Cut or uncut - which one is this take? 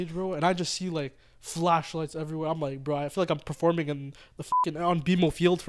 uncut